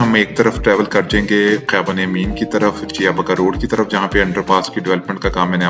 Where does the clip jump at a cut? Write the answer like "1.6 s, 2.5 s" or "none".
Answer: none